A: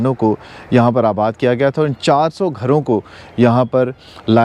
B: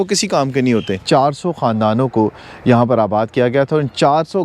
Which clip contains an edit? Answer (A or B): B